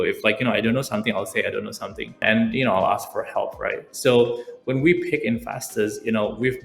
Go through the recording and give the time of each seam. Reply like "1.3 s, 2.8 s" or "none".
2.2 s